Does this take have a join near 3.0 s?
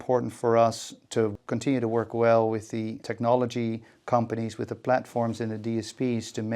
yes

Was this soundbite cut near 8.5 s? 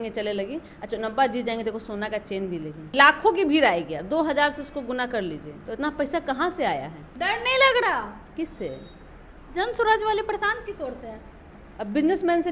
no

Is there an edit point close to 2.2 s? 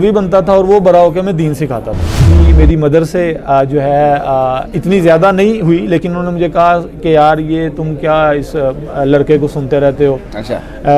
yes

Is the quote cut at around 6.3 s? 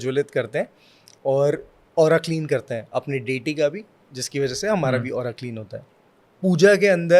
yes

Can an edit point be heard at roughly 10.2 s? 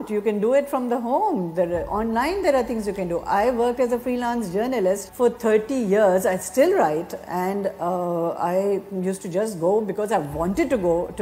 no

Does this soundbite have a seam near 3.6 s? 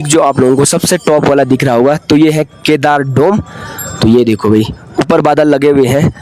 no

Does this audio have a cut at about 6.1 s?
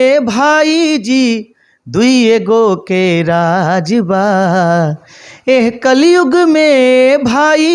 no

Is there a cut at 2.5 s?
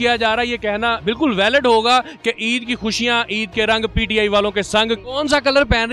no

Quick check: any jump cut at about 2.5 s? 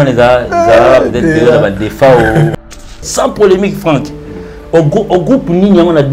yes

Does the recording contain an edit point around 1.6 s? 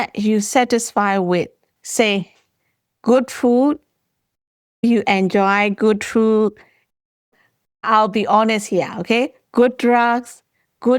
yes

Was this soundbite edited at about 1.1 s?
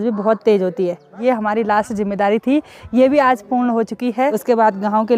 yes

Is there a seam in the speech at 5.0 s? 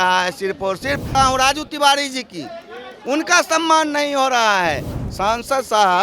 yes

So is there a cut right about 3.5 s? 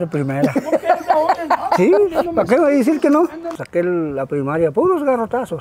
yes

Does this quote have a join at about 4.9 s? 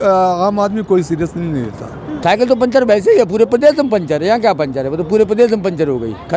no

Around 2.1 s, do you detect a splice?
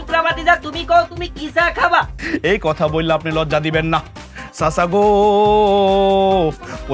yes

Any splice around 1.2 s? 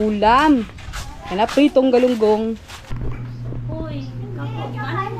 no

